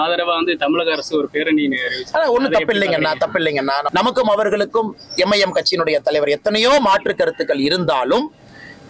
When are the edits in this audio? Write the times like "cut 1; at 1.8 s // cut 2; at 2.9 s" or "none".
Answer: cut 1; at 3.9 s